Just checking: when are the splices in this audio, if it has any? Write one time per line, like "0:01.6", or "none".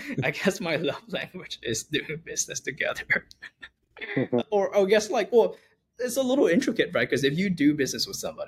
none